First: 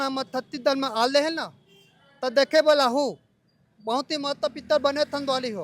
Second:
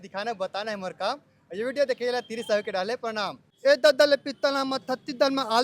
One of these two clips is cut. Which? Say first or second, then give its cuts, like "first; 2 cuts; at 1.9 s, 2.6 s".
second; 1 cut; at 3.4 s